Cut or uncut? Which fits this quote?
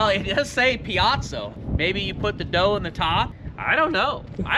cut